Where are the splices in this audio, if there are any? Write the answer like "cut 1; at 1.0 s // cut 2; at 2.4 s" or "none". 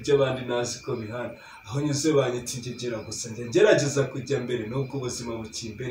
none